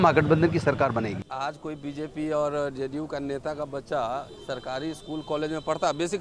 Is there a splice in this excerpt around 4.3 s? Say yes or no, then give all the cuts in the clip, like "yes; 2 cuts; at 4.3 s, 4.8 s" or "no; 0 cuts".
no; 1 cut; at 1.2 s